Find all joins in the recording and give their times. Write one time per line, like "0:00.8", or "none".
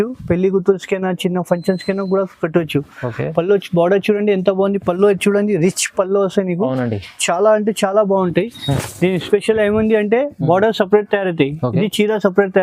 0:08.8